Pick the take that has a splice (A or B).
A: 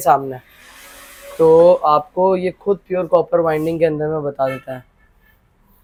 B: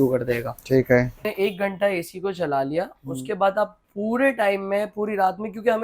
B